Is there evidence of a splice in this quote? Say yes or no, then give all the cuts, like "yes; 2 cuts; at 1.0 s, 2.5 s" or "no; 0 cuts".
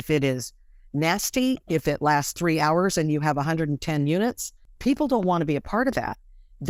no; 0 cuts